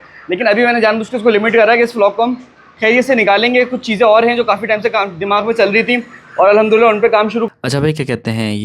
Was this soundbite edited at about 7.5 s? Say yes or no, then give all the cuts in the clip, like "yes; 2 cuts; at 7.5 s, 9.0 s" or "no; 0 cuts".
yes; 1 cut; at 7.5 s